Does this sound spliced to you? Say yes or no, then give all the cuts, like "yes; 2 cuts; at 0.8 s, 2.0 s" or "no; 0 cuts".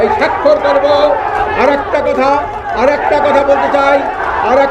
no; 0 cuts